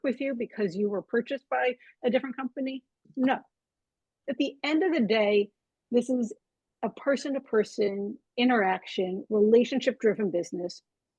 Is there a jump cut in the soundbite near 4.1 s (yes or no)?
yes